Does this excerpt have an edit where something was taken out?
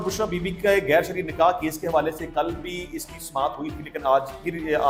no; 0 cuts

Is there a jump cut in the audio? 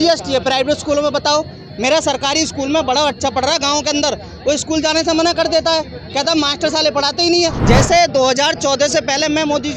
yes; 1 cut; at 7.6 s

